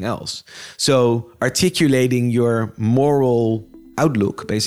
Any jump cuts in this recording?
yes; 1 cut; at 3.8 s

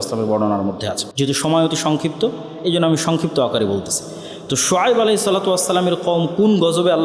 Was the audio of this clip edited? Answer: yes; 1 cut; at 1.0 s

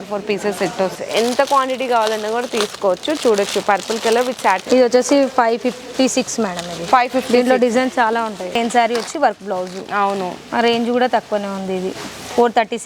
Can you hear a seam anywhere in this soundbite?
yes; 3 cuts; at 1.0 s, 4.6 s, 8.6 s

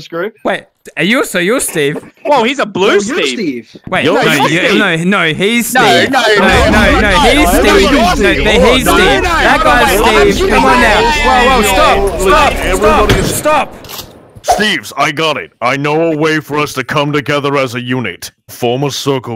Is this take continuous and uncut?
no; 1 cut; at 14.5 s

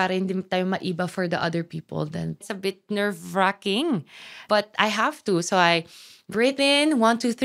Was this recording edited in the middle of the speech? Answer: yes; 2 cuts; at 2.4 s, 4.4 s

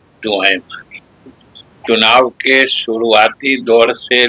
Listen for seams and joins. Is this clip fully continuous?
no; 1 cut; at 1.7 s

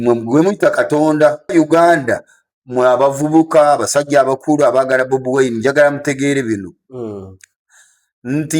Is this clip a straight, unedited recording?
no; 1 cut; at 1.5 s

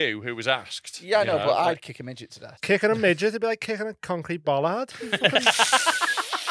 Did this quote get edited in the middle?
yes; 1 cut; at 2.5 s

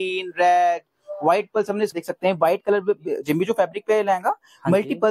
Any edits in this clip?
yes; 1 cut; at 1.9 s

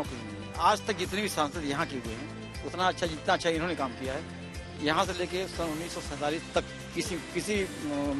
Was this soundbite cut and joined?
no; 0 cuts

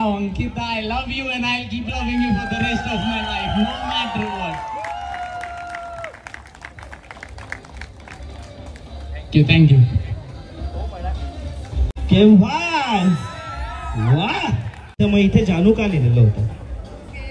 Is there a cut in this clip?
no; 0 cuts

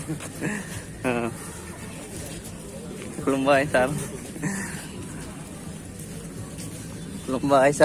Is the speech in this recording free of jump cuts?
yes; 0 cuts

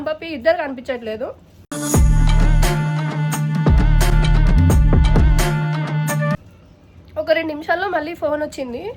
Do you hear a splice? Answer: no; 0 cuts

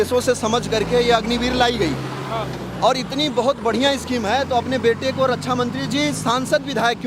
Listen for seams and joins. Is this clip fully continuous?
yes; 0 cuts

